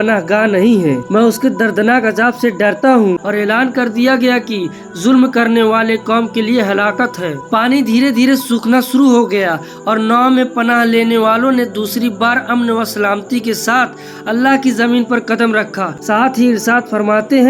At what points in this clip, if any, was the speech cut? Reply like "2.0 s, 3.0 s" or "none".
2.9 s, 15.9 s